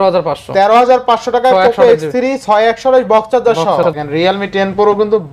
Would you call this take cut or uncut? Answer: cut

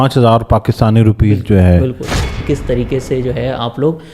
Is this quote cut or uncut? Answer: cut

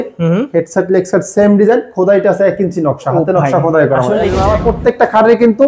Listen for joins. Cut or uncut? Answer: cut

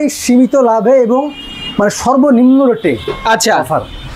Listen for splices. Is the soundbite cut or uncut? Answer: uncut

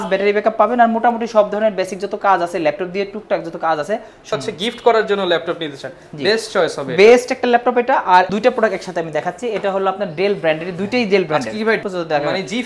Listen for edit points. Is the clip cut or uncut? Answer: cut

